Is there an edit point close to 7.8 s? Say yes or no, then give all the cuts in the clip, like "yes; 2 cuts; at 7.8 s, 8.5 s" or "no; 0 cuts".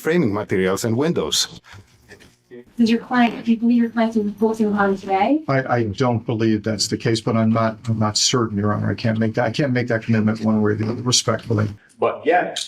no; 2 cuts; at 2.6 s, 11.8 s